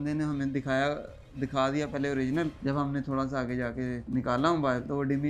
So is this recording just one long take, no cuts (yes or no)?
no